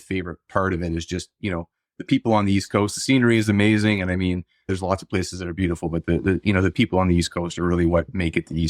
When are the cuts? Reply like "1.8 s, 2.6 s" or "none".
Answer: none